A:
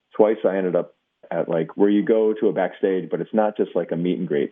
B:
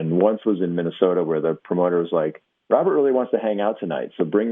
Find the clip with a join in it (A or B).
A